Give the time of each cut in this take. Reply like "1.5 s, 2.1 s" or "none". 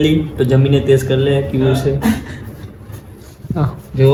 none